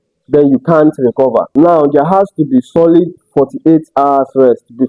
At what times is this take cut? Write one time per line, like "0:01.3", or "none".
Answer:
0:01.5